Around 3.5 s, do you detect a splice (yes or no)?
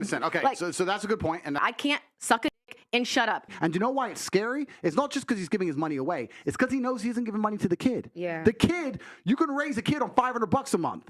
yes